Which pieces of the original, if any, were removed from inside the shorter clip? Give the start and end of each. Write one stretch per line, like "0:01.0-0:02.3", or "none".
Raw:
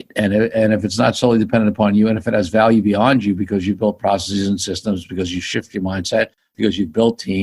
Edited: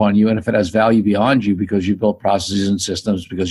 none